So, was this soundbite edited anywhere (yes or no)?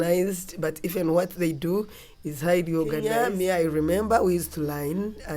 yes